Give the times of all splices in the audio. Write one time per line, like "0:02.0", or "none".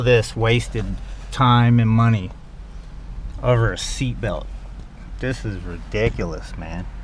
none

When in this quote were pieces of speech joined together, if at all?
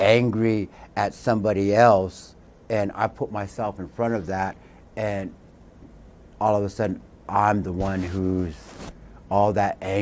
0:03.8

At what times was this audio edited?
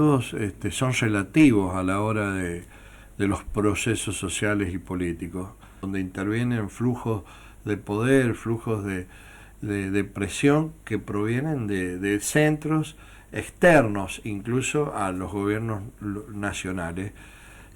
0:05.9

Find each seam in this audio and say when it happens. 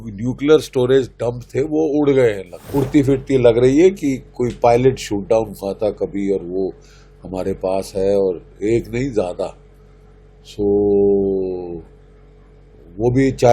0:02.5

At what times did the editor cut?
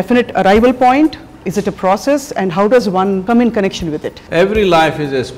0:03.2
0:04.2

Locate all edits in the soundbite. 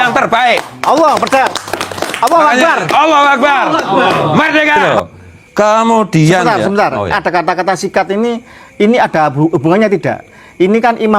0:04.8

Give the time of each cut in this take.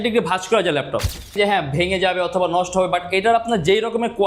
0:01.4

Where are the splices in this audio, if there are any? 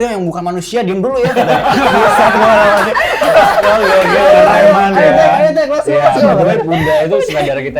none

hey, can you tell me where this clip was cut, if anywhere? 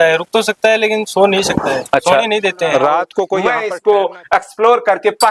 0:03.4

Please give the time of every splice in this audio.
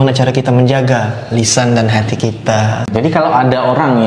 0:02.9

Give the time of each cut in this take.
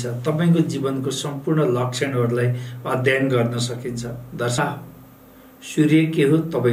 0:04.6

